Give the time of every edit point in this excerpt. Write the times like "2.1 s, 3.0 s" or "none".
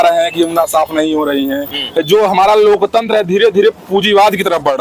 1.8 s